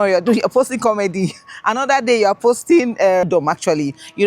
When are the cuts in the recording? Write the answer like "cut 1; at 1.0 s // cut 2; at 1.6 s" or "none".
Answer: cut 1; at 3.2 s